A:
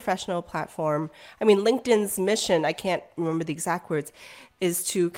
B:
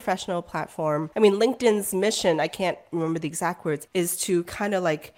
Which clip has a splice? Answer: B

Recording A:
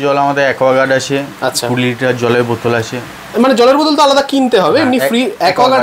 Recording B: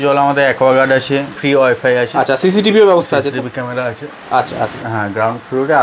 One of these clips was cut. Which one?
B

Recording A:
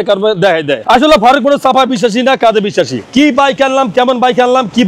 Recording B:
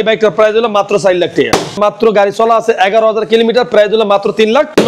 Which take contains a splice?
B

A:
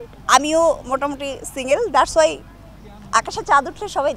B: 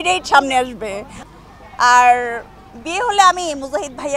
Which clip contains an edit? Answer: B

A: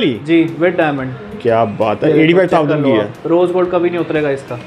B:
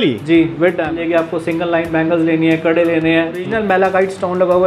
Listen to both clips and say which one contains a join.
B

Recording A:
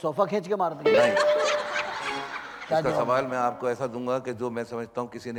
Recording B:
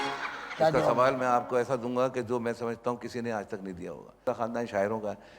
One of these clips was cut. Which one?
B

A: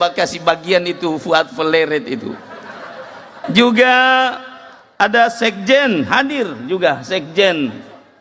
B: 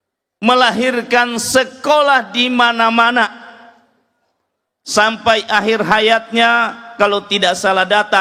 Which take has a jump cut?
A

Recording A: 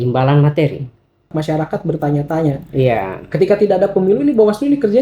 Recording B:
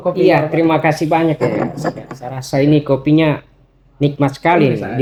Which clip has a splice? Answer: A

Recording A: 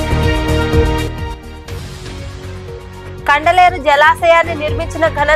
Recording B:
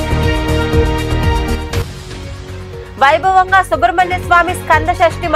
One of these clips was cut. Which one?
B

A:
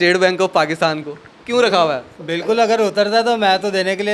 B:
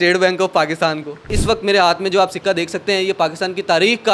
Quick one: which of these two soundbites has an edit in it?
B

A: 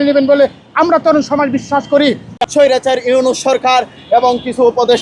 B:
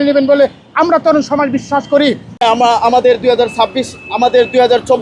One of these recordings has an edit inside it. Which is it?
A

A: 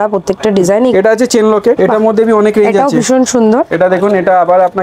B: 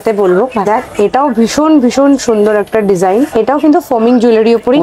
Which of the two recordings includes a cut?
A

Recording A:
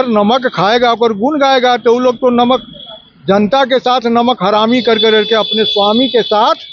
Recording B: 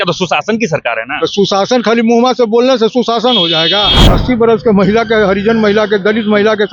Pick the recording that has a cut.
B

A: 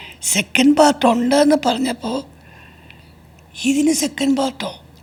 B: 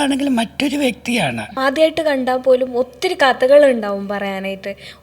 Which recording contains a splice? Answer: B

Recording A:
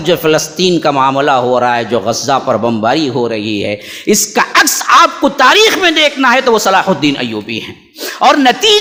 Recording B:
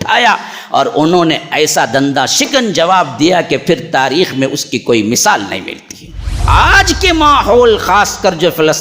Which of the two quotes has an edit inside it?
B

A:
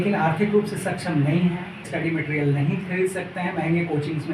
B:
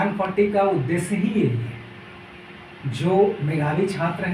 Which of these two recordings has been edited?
A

